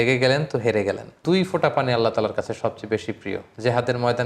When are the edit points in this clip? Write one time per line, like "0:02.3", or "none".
0:01.2